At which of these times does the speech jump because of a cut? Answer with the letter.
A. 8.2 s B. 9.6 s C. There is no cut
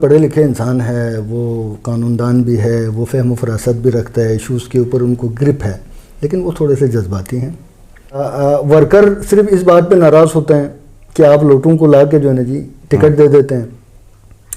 A